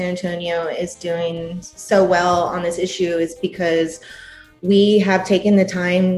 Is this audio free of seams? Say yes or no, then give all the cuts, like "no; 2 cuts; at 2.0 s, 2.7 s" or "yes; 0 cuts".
yes; 0 cuts